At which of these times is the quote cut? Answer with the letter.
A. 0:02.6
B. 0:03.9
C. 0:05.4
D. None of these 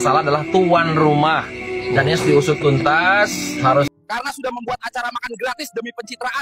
B